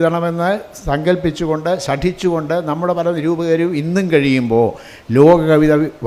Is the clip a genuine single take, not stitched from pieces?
yes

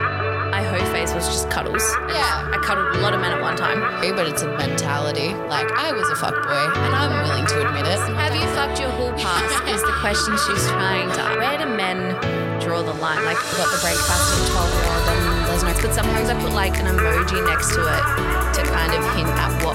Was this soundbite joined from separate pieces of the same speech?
no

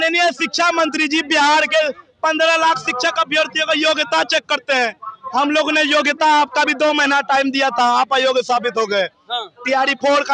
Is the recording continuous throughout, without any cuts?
yes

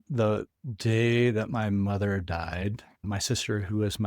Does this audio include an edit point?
yes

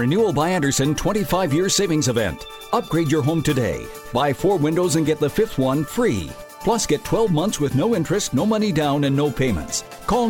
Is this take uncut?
yes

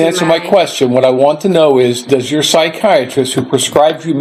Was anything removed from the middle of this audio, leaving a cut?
no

